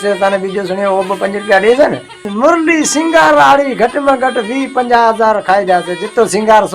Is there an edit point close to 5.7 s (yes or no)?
no